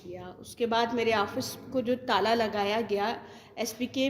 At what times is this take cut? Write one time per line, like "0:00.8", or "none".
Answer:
none